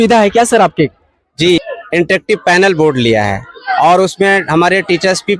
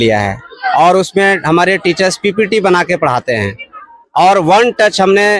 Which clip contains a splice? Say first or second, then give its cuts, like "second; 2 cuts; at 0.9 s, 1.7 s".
first; 1 cut; at 1.6 s